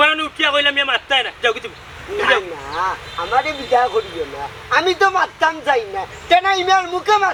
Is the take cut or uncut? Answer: uncut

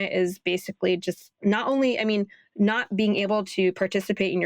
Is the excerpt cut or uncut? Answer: uncut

